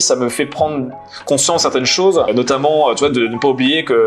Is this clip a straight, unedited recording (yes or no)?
yes